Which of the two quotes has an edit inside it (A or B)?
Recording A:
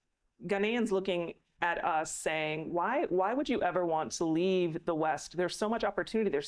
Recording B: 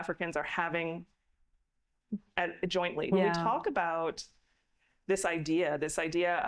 B